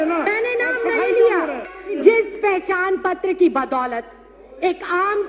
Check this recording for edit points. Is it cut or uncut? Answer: cut